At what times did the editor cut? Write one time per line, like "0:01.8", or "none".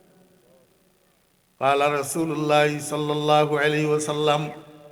none